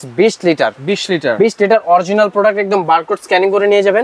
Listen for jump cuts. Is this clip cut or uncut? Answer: uncut